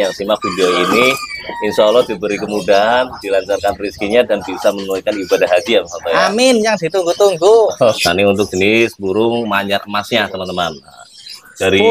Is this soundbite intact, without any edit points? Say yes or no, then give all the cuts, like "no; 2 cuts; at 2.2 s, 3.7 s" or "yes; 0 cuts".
no; 1 cut; at 7.9 s